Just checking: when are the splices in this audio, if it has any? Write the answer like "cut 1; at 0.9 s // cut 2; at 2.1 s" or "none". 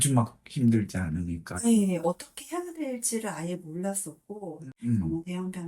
cut 1; at 4.7 s